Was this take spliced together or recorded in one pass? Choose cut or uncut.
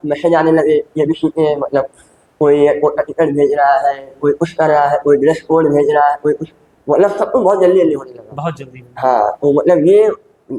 uncut